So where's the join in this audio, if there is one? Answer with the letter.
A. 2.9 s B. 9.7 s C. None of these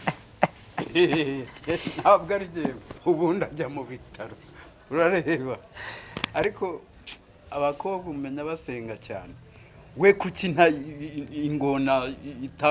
A